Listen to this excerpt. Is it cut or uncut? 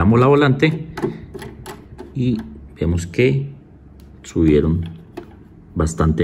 uncut